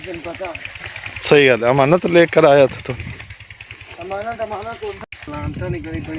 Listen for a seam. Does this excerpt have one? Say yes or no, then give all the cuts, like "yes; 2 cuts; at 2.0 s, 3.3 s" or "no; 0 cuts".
yes; 1 cut; at 5.0 s